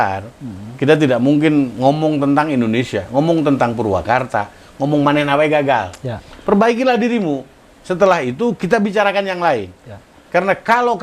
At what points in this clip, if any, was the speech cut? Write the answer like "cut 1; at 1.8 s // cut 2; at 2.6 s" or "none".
none